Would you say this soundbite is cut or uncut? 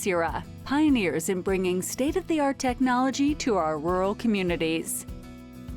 cut